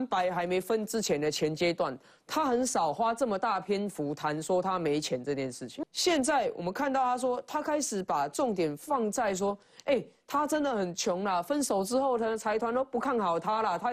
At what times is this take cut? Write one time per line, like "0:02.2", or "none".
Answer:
0:05.7

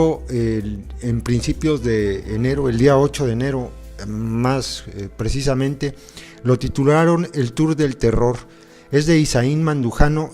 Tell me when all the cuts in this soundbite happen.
0:04.5

